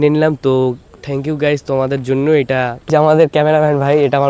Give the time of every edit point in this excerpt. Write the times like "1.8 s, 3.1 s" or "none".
2.9 s

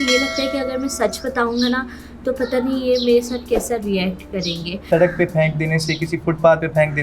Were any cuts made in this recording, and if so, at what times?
4.8 s

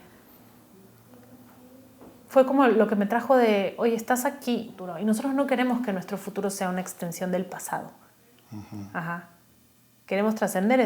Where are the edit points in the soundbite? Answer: 4.8 s

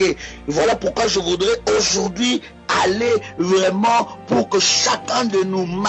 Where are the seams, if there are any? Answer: 3.3 s

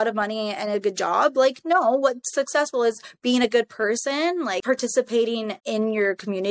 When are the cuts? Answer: none

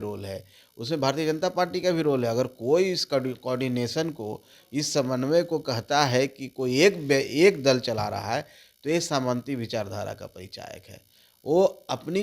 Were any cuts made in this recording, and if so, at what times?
none

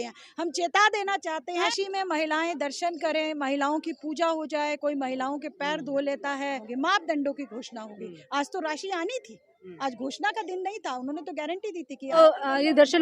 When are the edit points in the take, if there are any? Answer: 1.7 s, 6.6 s, 12.2 s

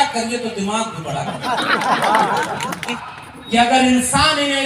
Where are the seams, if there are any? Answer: 2.9 s

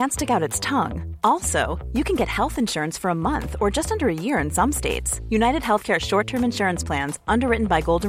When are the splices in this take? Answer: none

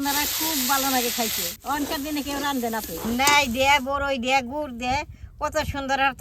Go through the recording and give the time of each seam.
3.0 s

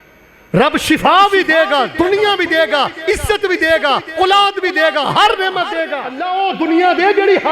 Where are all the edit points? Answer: 6.2 s

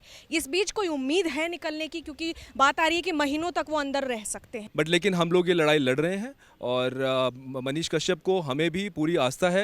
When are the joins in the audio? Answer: 4.6 s

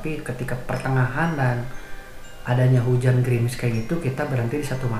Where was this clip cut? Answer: none

